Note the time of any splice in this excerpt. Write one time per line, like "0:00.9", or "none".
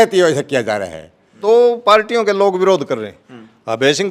0:01.3